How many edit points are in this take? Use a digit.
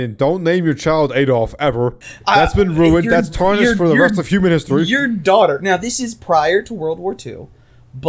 1